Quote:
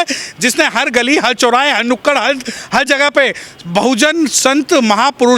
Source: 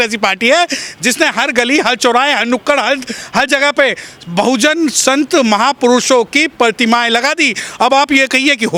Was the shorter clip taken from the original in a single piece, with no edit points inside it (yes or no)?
yes